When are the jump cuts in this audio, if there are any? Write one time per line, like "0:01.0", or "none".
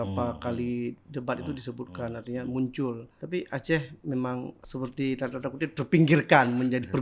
0:03.1
0:04.6